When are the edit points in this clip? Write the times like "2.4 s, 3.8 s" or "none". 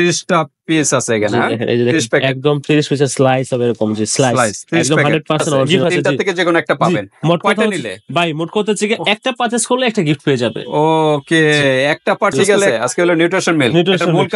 5.7 s, 12.5 s

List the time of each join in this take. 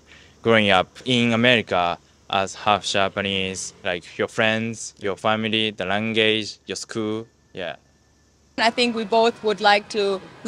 1.0 s, 3.8 s, 8.6 s

